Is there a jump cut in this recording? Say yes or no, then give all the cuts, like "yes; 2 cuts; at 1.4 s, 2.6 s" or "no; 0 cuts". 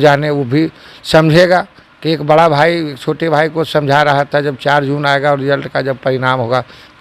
no; 0 cuts